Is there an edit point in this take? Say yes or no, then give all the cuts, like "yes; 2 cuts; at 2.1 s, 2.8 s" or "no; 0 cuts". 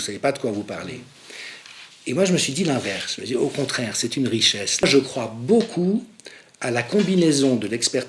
yes; 1 cut; at 4.8 s